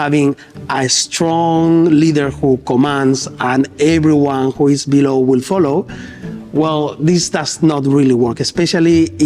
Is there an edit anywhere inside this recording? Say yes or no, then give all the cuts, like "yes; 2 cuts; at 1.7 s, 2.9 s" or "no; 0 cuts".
no; 0 cuts